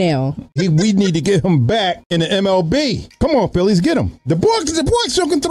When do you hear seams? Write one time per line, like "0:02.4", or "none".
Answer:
0:02.0
0:03.1